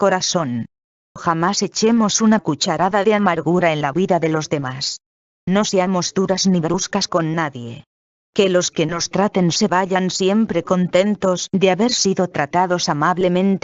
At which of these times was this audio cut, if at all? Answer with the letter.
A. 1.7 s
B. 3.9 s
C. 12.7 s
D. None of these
C